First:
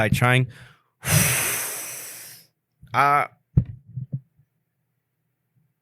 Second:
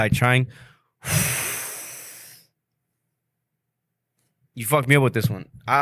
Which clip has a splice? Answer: first; 1 cut; at 2.7 s

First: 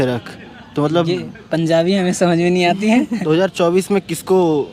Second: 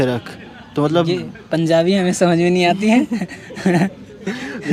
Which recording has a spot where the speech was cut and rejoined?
first; 1 cut; at 3.2 s

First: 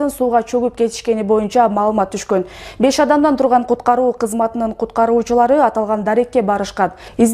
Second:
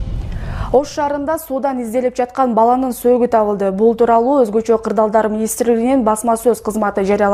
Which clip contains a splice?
first; 1 cut; at 6.4 s

